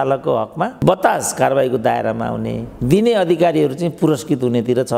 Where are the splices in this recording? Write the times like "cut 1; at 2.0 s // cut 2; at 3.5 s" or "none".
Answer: none